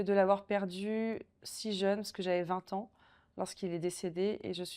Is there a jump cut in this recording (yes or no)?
no